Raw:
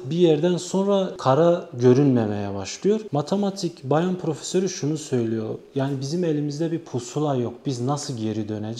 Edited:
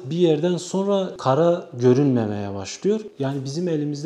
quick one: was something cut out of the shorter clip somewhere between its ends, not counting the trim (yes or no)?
yes